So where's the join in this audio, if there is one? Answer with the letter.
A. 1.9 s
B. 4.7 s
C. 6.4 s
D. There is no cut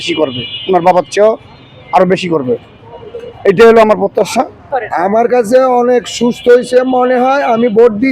B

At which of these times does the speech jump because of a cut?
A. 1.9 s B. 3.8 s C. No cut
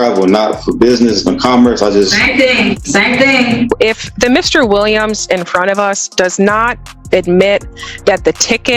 B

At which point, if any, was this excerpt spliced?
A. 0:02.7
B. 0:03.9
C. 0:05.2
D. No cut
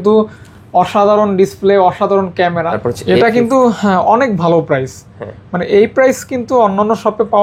A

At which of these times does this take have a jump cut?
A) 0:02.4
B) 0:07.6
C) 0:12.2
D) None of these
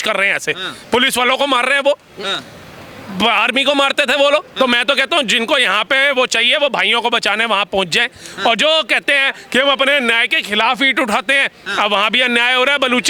D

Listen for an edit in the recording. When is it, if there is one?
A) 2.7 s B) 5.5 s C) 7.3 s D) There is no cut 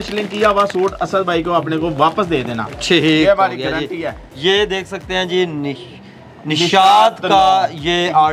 D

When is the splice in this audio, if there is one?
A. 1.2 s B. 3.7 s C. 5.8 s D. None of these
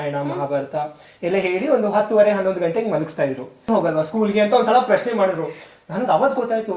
B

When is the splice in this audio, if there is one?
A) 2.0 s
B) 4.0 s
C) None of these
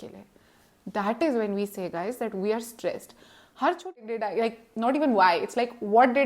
B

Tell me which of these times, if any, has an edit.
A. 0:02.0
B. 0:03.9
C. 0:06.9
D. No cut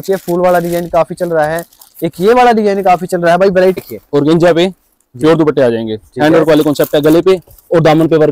B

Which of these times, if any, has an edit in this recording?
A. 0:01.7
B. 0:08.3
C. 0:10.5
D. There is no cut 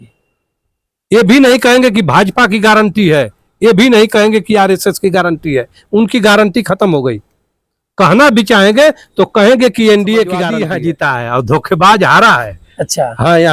C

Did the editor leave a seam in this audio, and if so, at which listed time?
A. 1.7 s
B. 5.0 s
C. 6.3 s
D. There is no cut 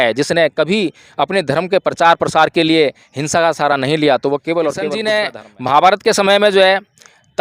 B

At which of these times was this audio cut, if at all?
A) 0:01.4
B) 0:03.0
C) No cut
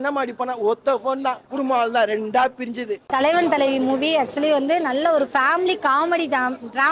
B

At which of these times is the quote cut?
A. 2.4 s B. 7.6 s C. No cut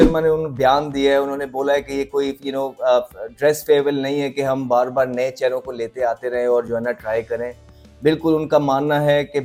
C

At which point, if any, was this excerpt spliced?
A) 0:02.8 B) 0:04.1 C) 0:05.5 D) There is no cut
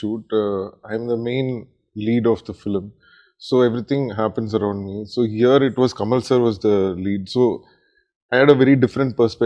D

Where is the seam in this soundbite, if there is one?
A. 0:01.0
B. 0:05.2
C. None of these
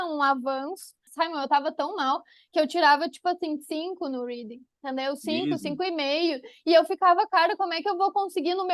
A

